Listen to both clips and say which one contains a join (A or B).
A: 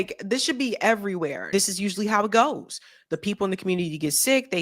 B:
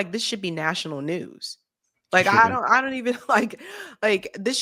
A